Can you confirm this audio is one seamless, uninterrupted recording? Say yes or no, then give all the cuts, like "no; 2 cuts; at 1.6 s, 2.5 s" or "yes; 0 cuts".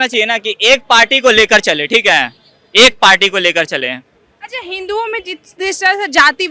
yes; 0 cuts